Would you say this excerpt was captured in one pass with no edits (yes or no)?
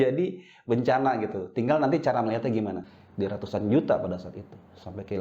no